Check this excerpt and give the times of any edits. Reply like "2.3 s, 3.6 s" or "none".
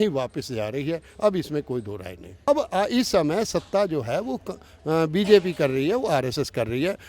2.5 s